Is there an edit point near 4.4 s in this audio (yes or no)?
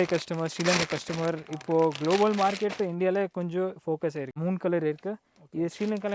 yes